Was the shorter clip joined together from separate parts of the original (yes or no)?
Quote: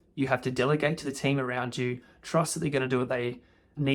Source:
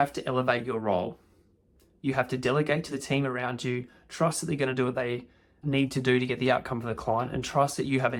no